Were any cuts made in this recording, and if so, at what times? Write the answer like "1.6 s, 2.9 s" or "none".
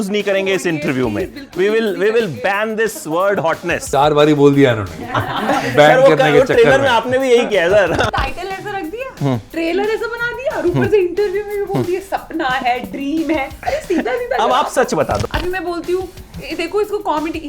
3.8 s, 8.1 s, 15.2 s